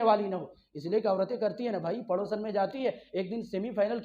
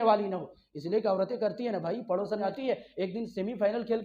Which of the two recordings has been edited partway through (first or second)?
second